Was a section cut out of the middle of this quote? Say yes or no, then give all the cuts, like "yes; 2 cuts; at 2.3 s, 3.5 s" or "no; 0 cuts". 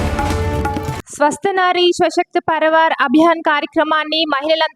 no; 0 cuts